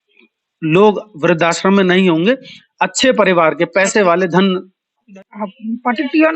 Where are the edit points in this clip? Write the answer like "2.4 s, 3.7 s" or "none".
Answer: 5.1 s